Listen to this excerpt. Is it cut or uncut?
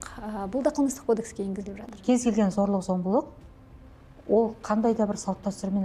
cut